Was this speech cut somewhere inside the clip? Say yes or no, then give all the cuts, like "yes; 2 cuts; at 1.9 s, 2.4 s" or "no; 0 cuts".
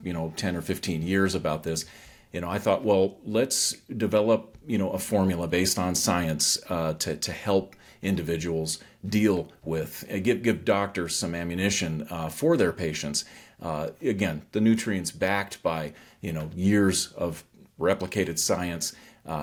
no; 0 cuts